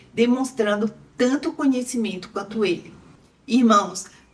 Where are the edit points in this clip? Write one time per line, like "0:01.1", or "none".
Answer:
none